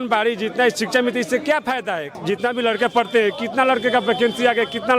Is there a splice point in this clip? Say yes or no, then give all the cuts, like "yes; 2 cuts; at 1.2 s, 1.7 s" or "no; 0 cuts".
yes; 1 cut; at 2.1 s